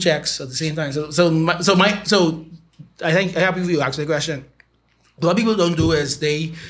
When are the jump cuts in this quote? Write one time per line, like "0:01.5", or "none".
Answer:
none